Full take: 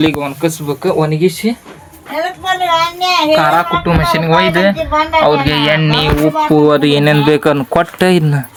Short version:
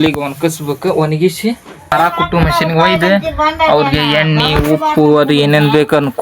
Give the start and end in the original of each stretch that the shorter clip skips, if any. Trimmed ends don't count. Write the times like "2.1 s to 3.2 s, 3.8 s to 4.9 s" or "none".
1.9 s to 3.4 s

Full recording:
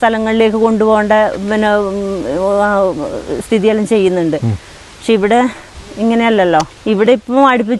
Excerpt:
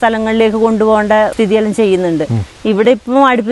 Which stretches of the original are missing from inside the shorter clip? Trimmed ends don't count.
1.3 s to 3.5 s, 4.7 s to 6.7 s

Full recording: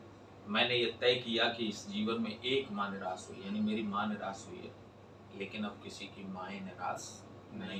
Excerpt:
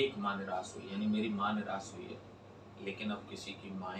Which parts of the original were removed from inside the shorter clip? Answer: none

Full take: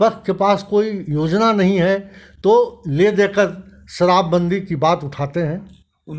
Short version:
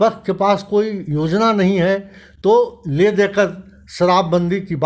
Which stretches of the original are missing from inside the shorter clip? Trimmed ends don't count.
none

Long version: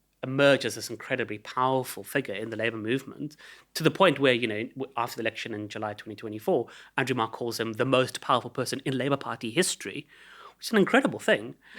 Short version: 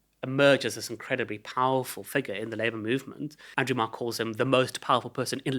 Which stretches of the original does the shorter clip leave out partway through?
3.4 s to 6.8 s

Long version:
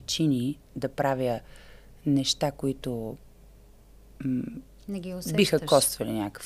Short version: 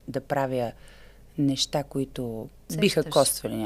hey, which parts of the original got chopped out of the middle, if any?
3.3 s to 5.2 s

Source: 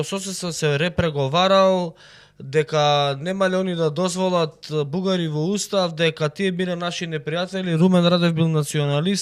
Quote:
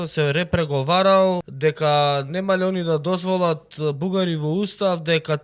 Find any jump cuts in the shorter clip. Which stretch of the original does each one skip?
1.9 s to 2.4 s

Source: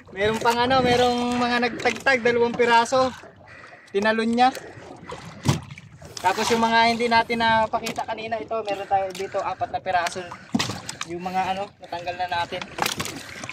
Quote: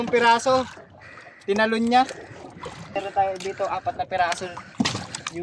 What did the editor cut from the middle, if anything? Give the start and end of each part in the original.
5.4 s to 8.7 s

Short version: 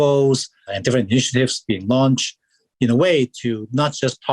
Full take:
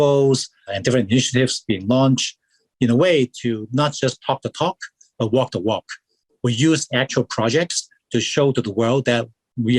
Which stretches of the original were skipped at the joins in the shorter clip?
none

